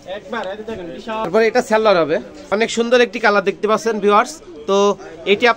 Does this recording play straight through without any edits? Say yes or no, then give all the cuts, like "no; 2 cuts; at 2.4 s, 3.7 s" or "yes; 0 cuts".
no; 2 cuts; at 1.3 s, 2.3 s